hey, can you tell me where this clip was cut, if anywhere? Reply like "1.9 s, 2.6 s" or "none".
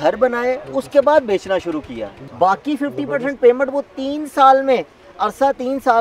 2.2 s